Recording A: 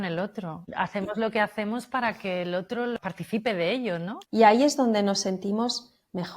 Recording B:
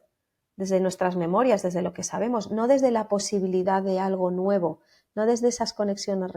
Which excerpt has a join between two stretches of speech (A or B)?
A